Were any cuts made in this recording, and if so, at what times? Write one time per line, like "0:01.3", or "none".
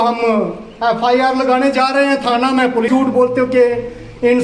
0:02.9